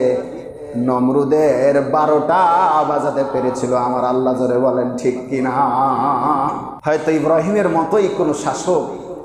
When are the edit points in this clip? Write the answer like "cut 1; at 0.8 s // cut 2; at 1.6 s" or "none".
cut 1; at 6.7 s